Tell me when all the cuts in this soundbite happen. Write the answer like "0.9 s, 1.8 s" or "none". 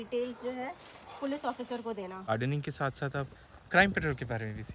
2.3 s